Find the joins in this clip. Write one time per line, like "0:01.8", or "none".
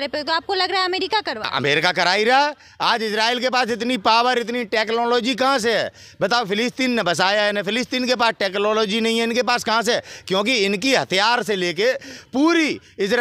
none